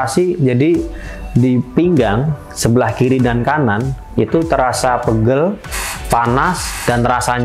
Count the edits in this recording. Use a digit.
0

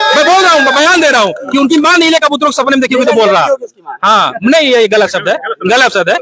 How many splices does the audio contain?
0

